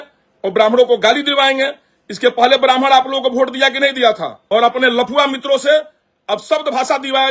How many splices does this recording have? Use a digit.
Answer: 1